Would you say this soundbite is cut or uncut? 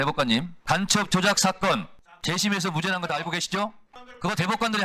uncut